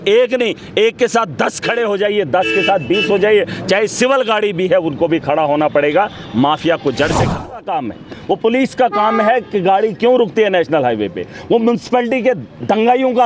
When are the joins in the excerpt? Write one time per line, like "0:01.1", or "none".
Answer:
0:07.6